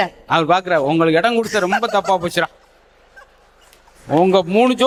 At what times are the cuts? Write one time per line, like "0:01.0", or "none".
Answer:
none

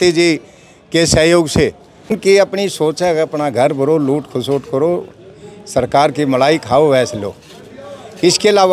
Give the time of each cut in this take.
0:02.1

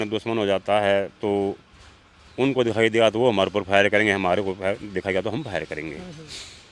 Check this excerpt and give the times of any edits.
none

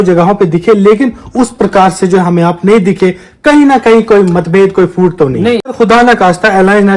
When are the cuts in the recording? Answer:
0:05.7

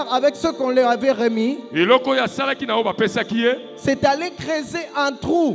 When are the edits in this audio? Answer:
none

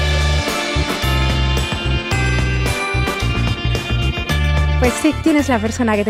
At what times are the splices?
none

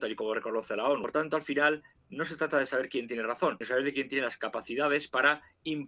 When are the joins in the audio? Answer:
0:01.1
0:03.6

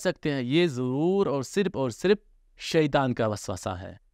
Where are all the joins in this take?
none

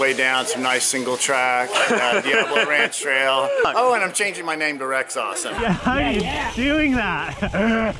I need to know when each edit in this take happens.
0:03.7
0:05.6

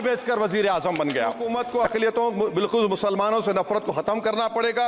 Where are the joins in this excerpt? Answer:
0:01.5

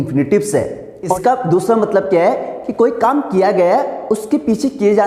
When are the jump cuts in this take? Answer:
0:01.2

